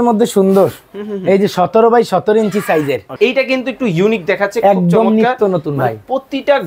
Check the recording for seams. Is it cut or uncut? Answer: cut